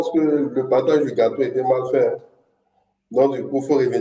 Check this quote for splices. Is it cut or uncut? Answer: uncut